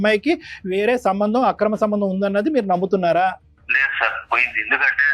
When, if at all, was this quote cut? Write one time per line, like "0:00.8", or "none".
0:03.5